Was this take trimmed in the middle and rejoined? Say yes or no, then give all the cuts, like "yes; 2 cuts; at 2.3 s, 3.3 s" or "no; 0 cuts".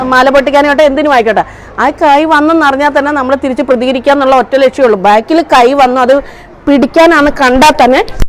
no; 0 cuts